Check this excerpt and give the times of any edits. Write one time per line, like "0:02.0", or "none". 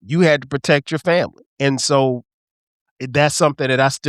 0:01.4

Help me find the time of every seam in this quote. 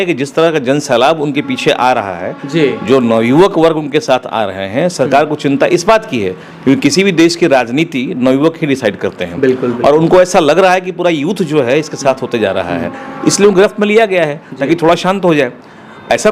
none

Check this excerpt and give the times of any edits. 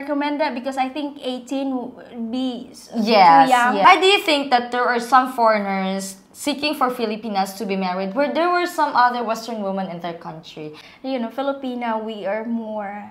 0:03.9
0:10.7

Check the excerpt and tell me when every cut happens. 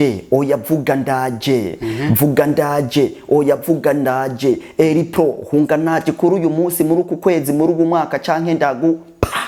none

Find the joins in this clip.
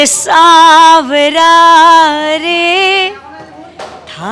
none

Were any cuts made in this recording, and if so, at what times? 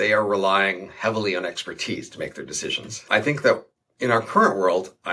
0:03.0

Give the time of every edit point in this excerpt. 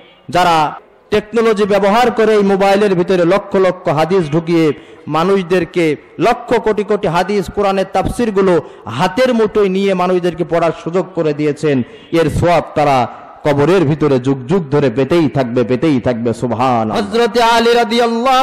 0:17.0

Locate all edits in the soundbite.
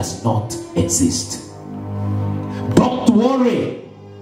none

